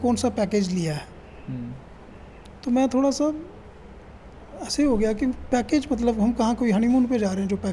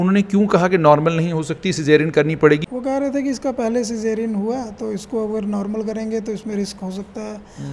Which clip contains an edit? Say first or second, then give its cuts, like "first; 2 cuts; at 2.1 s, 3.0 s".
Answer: second; 1 cut; at 2.7 s